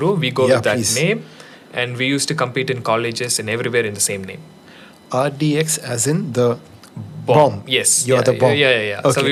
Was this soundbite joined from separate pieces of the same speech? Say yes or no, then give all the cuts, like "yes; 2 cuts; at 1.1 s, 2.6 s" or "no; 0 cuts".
no; 0 cuts